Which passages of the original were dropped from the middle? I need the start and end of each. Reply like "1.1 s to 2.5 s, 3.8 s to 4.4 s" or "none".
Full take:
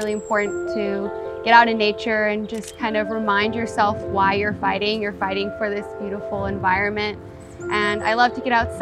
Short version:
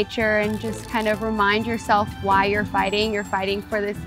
none